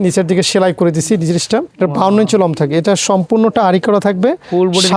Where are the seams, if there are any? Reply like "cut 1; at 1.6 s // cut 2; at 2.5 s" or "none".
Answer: cut 1; at 1.7 s